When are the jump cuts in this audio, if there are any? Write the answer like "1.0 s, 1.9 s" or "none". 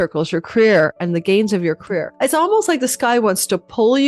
2.1 s